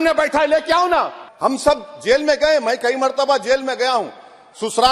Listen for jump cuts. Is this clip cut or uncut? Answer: cut